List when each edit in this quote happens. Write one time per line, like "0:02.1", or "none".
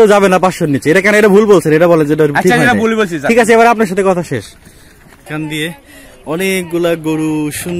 0:05.2